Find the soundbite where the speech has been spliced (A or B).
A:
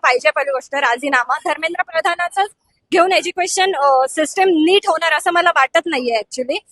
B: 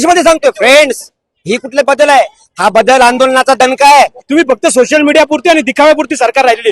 B